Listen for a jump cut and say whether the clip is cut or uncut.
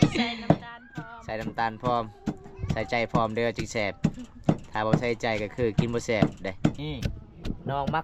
cut